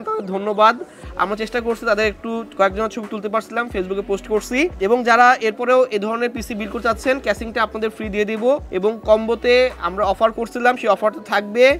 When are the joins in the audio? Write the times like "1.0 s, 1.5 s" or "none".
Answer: 4.7 s, 8.7 s